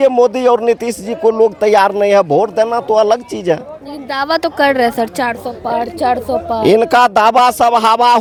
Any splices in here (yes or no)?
no